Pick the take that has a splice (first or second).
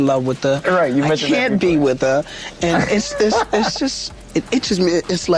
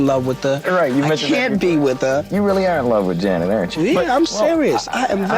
second